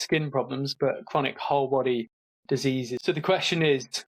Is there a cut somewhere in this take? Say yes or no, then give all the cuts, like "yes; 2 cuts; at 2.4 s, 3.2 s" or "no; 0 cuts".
yes; 1 cut; at 3.0 s